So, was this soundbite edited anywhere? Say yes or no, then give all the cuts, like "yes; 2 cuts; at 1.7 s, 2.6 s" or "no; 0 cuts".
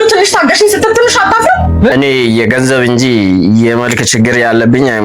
yes; 1 cut; at 1.9 s